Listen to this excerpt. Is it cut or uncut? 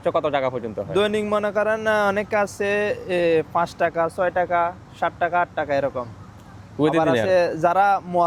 uncut